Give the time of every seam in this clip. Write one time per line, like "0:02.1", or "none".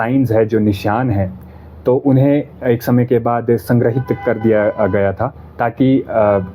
none